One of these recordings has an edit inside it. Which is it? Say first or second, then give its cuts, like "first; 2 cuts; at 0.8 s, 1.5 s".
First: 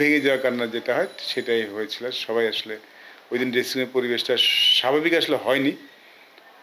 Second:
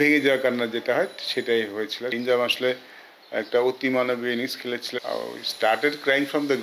second; 2 cuts; at 2.1 s, 4.9 s